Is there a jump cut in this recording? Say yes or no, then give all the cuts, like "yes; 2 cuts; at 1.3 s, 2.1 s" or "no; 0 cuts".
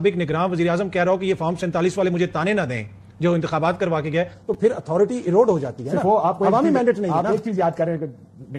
no; 0 cuts